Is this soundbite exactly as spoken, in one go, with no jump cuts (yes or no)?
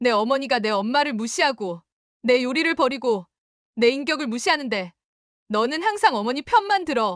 yes